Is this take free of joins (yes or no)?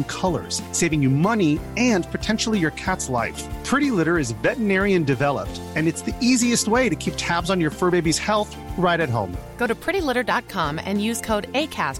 yes